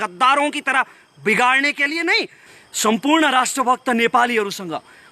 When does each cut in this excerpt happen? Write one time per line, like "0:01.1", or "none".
0:02.4

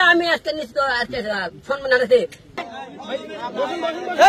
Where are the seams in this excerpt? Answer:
0:02.6

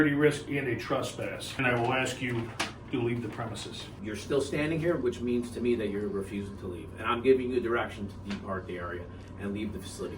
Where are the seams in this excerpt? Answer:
0:01.6
0:03.9

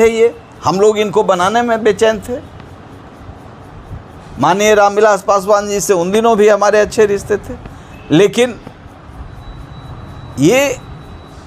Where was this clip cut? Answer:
none

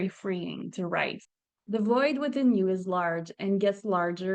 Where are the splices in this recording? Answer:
0:01.2

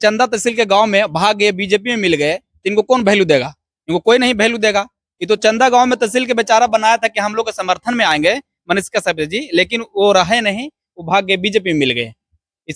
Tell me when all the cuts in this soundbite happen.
none

